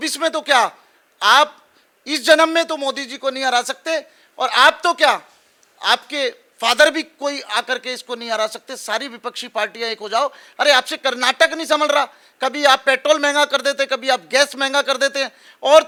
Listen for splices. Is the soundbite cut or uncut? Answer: uncut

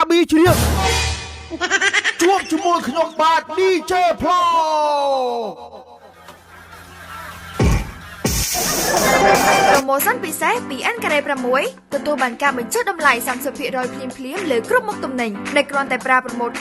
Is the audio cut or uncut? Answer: cut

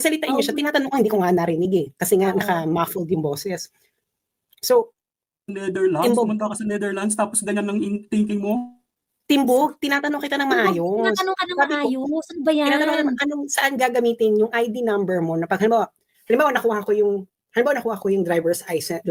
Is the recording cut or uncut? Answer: uncut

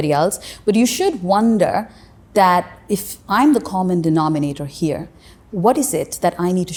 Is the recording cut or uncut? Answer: uncut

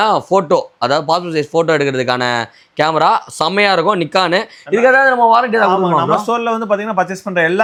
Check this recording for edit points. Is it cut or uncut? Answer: uncut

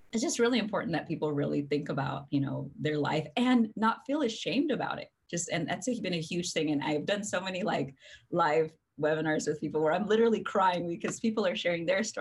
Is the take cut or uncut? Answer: uncut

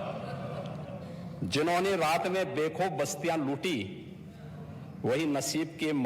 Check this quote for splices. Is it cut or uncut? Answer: uncut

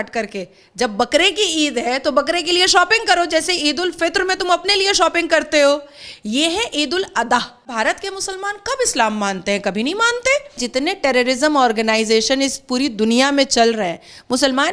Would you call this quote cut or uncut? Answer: cut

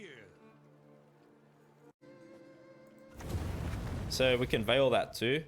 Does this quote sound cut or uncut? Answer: cut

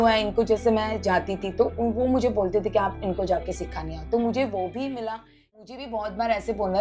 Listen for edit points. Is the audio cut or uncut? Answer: cut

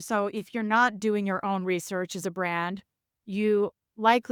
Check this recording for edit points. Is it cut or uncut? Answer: uncut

